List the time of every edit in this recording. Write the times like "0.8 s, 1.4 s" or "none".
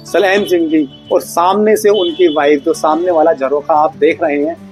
none

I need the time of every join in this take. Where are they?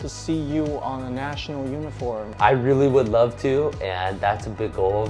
2.3 s

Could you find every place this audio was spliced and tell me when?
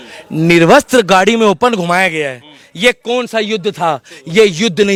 none

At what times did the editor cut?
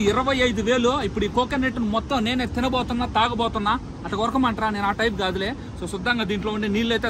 none

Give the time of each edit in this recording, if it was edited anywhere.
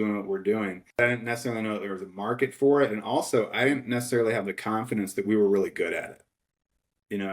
1.0 s

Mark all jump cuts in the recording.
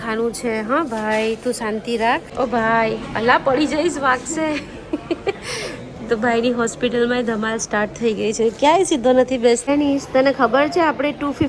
none

